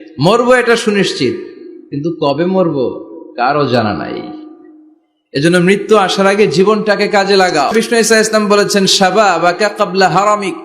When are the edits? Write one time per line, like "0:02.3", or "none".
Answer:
0:07.7